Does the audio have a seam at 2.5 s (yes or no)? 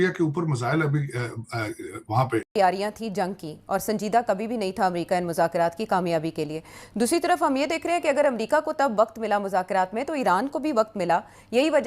yes